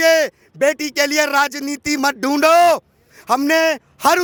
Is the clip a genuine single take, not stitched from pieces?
yes; 0 cuts

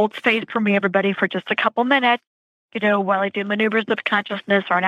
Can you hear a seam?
no; 0 cuts

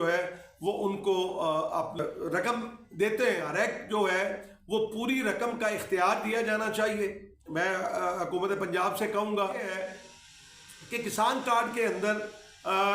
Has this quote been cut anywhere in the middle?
yes; 3 cuts; at 2.0 s, 3.5 s, 9.7 s

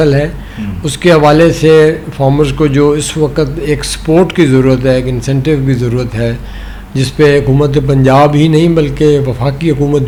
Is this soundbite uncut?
yes; 0 cuts

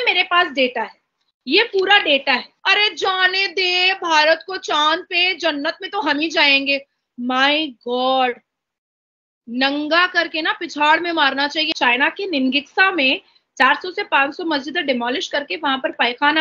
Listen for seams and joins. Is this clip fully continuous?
no; 2 cuts; at 2.5 s, 11.7 s

